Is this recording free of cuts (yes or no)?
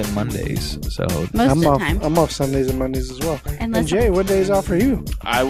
yes